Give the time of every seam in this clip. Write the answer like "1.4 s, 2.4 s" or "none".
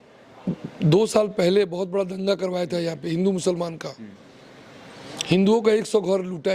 none